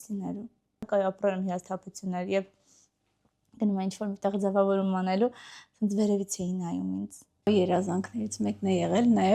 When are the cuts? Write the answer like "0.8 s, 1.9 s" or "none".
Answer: 0.9 s, 7.5 s